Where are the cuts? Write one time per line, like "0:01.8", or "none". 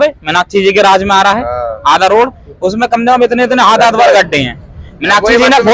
none